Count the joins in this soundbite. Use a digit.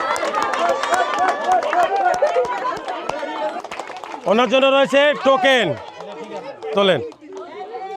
1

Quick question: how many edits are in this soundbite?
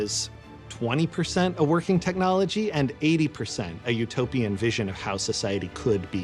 0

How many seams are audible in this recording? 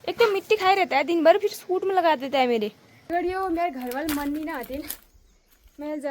1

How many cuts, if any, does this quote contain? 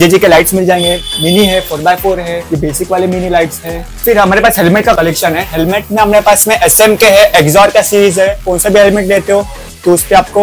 2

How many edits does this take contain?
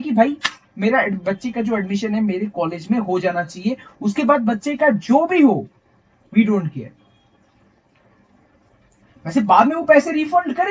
0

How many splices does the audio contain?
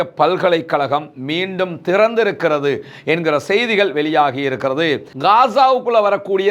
1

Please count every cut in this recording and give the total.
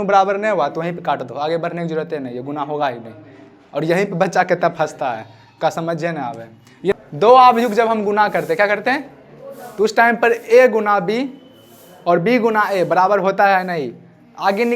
1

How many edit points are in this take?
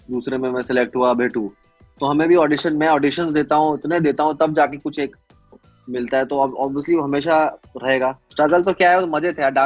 1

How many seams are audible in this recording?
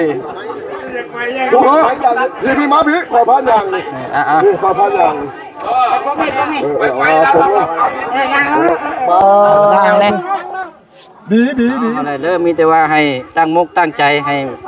1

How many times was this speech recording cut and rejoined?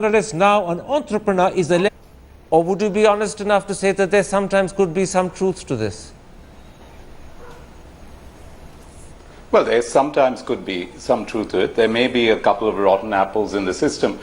0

